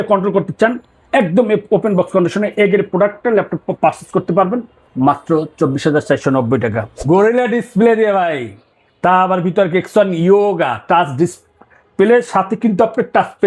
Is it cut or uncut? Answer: cut